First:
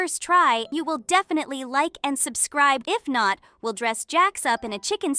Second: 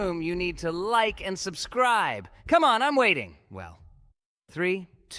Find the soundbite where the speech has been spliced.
first; 2 cuts; at 0.7 s, 2.8 s

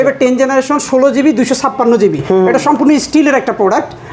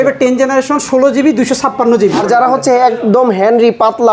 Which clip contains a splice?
second; 1 cut; at 2.2 s

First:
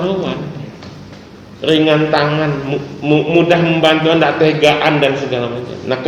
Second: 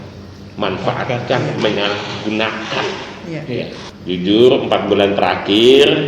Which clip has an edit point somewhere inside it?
second; 1 cut; at 3.9 s

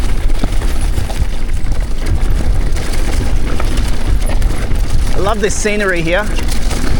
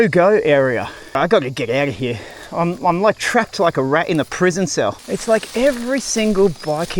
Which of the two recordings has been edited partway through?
second; 2 cuts; at 1.2 s, 5.0 s

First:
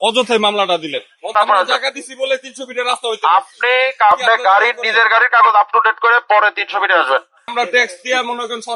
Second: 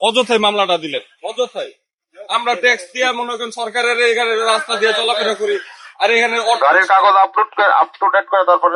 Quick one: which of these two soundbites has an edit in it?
first; 3 cuts; at 1.3 s, 4.1 s, 7.5 s

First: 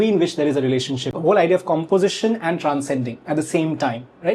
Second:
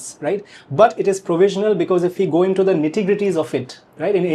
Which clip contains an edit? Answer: first; 1 cut; at 1.1 s

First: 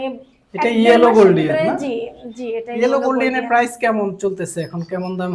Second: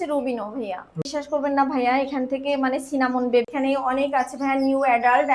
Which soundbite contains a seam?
second; 2 cuts; at 1.0 s, 3.5 s

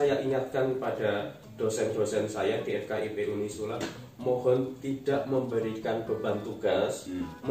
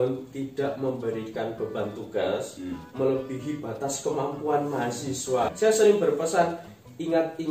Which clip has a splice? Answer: second; 1 cut; at 5.5 s

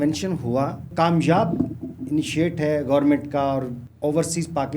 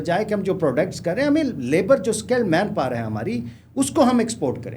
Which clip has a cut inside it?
first; 2 cuts; at 0.9 s, 3.8 s

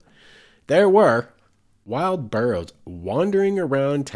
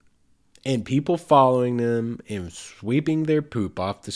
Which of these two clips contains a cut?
first; 1 cut; at 1.7 s

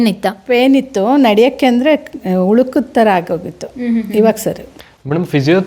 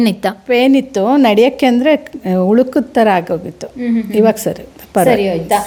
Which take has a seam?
first; 1 cut; at 4.7 s

